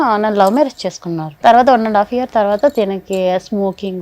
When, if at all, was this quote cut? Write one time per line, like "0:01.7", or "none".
0:01.3